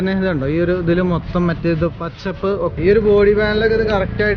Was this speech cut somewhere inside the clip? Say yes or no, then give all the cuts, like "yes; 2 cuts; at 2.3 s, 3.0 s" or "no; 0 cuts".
yes; 1 cut; at 2.7 s